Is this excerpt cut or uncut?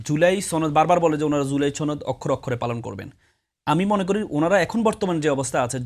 uncut